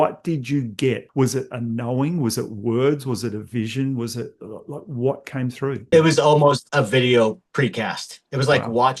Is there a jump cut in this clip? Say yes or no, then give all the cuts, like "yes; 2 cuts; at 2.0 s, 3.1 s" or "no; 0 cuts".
yes; 4 cuts; at 1.0 s, 5.9 s, 6.6 s, 7.4 s